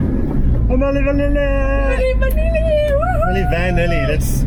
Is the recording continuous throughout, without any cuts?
yes; 0 cuts

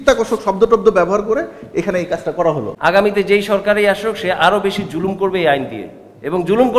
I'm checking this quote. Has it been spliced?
yes; 1 cut; at 2.7 s

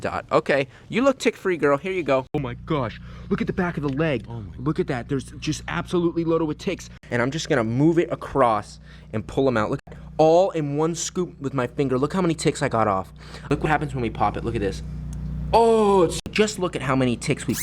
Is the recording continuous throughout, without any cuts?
no; 5 cuts; at 2.5 s, 7.0 s, 9.8 s, 13.6 s, 16.3 s

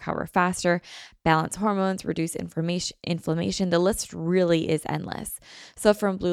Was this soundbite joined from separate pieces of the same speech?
no; 0 cuts

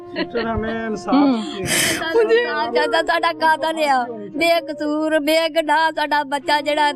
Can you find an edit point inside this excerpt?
no; 0 cuts

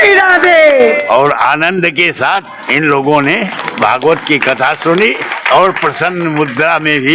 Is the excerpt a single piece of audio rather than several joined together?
no; 4 cuts; at 1.0 s, 2.6 s, 3.6 s, 5.3 s

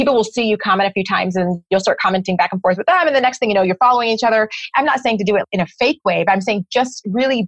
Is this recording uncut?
no; 2 cuts; at 4.6 s, 5.4 s

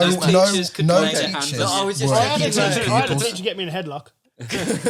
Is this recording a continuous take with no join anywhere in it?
yes; 0 cuts

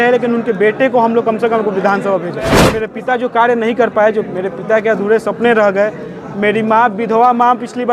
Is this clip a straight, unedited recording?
no; 1 cut; at 2.8 s

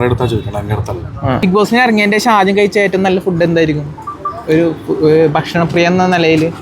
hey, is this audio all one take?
no; 1 cut; at 1.4 s

